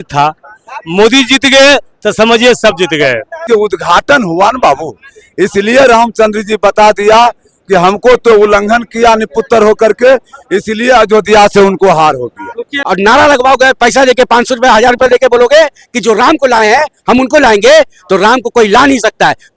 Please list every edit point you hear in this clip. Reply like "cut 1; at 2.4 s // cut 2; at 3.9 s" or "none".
cut 1; at 3.4 s // cut 2; at 12.8 s